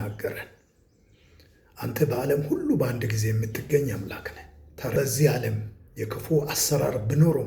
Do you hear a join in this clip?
yes; 1 cut; at 4.9 s

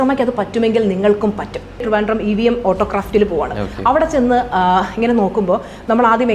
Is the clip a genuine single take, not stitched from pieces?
no; 1 cut; at 1.8 s

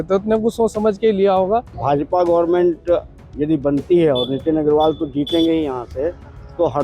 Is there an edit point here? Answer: yes; 1 cut; at 1.7 s

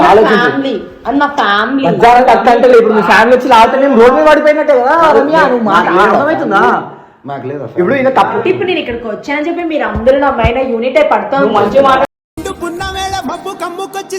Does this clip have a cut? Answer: no; 0 cuts

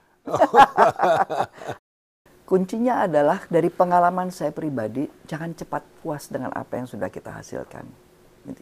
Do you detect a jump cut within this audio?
yes; 1 cut; at 1.8 s

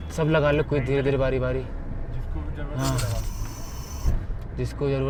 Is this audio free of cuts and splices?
yes; 0 cuts

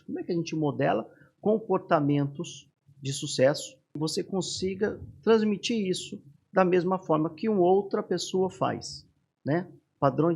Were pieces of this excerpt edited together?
yes; 1 cut; at 4.0 s

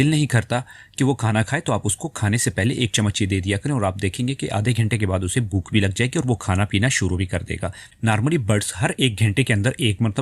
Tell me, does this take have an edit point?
yes; 1 cut; at 7.8 s

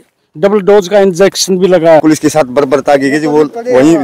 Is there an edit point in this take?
yes; 1 cut; at 2.0 s

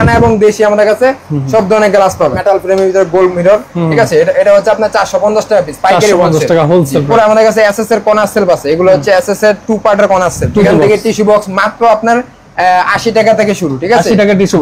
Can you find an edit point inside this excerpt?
yes; 3 cuts; at 2.4 s, 7.1 s, 10.7 s

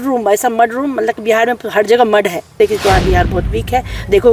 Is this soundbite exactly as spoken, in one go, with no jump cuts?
no; 1 cut; at 2.6 s

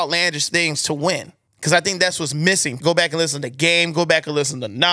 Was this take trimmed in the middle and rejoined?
yes; 1 cut; at 2.7 s

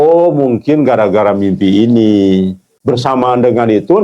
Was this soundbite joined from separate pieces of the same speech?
yes; 1 cut; at 2.7 s

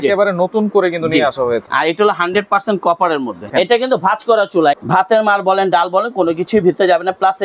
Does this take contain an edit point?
yes; 3 cuts; at 1.6 s, 3.4 s, 4.8 s

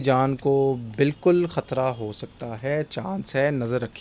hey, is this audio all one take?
yes; 0 cuts

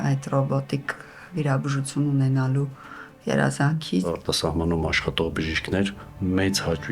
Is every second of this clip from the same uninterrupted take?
no; 1 cut; at 4.1 s

